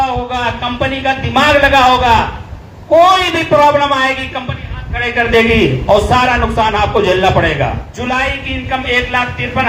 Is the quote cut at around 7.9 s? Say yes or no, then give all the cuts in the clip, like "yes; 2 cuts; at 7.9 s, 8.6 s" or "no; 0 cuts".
yes; 1 cut; at 7.9 s